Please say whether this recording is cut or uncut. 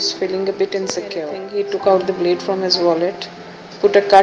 cut